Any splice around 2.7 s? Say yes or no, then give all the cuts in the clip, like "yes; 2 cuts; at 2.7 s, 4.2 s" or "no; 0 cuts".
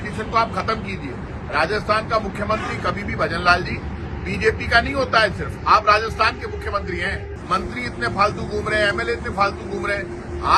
no; 1 cut; at 7.3 s